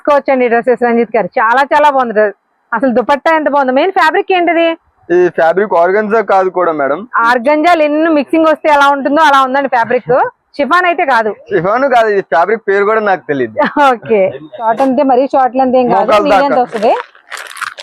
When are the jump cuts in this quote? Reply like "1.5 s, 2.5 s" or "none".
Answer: 14.6 s